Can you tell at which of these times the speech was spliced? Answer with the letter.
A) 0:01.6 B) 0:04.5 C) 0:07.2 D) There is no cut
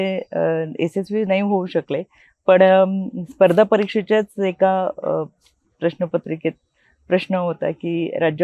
D